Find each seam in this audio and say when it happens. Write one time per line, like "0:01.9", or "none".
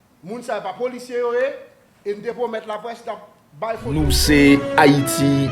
0:03.8